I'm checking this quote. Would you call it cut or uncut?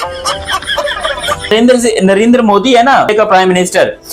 cut